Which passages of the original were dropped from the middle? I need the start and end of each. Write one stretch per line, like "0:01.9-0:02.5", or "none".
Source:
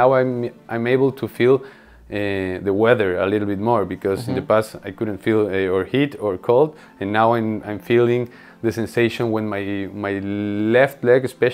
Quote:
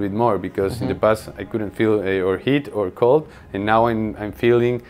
none